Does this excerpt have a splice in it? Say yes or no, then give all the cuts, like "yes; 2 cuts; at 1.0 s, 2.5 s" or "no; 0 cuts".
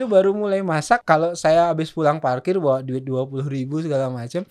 yes; 1 cut; at 1.0 s